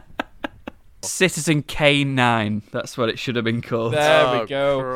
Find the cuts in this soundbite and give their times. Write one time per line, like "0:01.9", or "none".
0:01.1